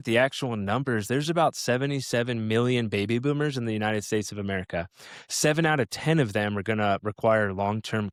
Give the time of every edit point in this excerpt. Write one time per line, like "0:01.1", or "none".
none